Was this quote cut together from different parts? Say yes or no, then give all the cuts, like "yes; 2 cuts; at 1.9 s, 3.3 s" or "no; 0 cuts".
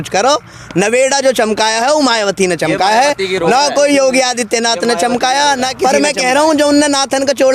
no; 0 cuts